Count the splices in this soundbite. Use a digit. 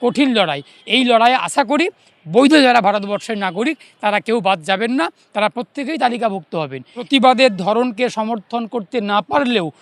1